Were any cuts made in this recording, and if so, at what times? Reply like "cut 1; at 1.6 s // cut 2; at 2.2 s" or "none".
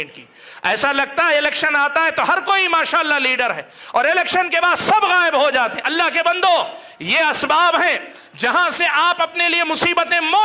none